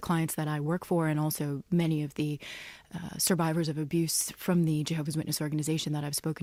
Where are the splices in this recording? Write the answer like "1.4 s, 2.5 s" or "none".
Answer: none